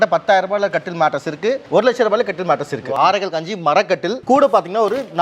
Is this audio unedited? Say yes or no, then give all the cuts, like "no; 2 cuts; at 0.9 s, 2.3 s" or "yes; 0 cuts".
no; 2 cuts; at 1.6 s, 2.9 s